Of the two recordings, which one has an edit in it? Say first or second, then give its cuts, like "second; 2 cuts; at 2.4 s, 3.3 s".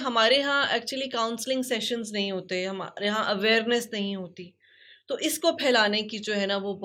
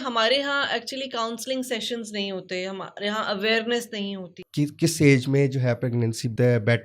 second; 1 cut; at 4.4 s